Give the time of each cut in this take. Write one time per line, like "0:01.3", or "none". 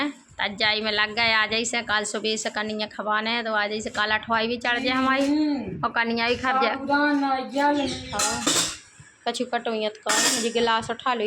0:08.1